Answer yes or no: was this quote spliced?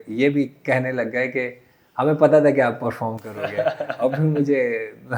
no